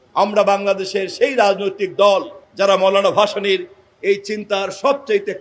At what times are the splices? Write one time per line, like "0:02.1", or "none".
none